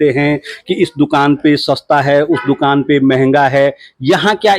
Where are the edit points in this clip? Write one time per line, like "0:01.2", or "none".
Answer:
none